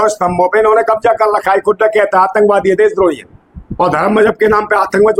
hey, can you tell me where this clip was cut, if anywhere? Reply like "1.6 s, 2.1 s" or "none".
none